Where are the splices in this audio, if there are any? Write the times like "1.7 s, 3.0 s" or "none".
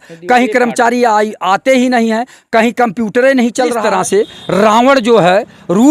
3.8 s